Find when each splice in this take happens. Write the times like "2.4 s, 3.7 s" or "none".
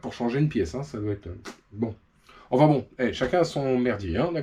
none

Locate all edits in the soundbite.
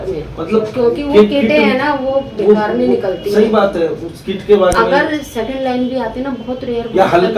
none

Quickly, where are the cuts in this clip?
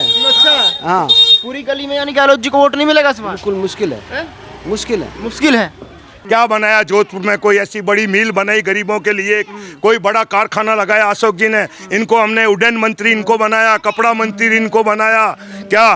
6.1 s

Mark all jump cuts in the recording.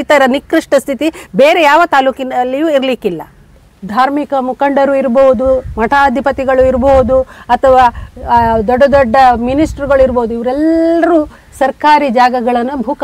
3.7 s

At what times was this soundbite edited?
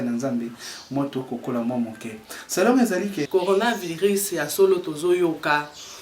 3.3 s

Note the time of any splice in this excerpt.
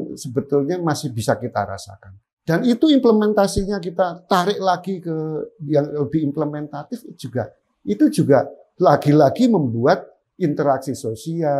2.3 s

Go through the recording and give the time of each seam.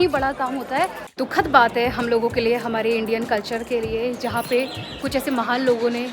1.0 s

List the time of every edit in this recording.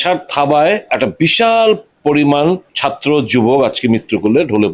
0.9 s, 1.9 s, 2.7 s

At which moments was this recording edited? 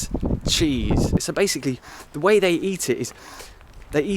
1.2 s

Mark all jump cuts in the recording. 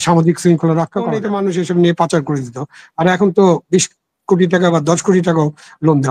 1.2 s

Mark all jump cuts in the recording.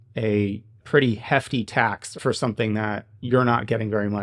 2.1 s

